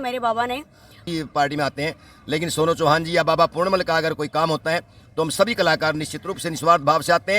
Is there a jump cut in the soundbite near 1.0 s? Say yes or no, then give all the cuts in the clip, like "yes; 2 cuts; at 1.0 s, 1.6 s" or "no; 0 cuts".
yes; 1 cut; at 1.0 s